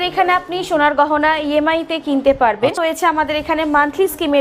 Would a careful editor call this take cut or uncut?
cut